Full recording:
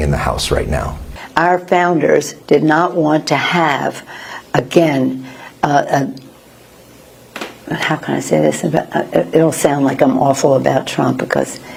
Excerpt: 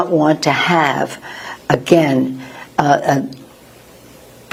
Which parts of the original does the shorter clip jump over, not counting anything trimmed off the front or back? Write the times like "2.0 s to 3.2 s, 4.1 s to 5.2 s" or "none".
none